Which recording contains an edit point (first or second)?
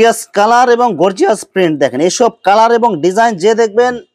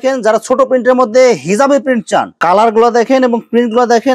second